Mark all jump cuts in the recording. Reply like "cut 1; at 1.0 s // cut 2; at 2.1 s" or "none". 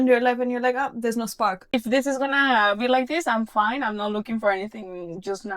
cut 1; at 1.7 s